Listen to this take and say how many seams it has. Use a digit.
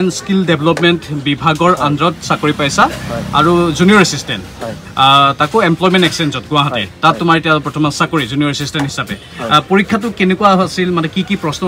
0